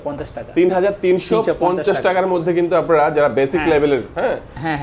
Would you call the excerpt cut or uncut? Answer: uncut